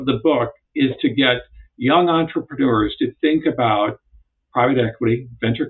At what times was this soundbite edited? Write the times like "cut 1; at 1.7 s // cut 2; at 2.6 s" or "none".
none